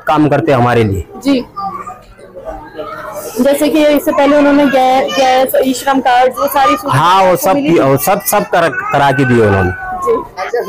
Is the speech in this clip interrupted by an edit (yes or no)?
no